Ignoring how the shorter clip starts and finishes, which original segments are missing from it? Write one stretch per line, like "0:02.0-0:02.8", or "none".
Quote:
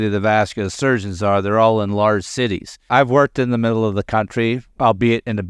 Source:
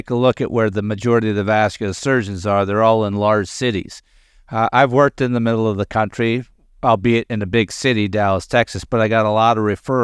0:04.1-0:04.7
0:06.5-0:06.7